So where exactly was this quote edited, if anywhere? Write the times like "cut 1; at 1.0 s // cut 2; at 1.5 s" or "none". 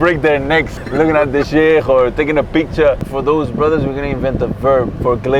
cut 1; at 3.1 s